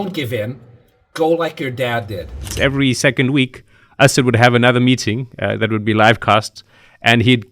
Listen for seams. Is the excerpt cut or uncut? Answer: cut